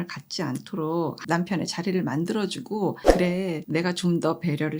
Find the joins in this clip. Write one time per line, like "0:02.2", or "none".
0:01.2
0:03.0